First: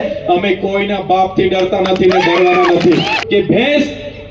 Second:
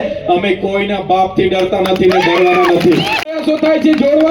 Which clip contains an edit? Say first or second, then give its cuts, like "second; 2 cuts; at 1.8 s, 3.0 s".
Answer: first; 1 cut; at 3.2 s